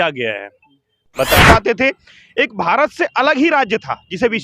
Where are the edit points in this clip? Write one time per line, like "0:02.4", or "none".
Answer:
0:01.4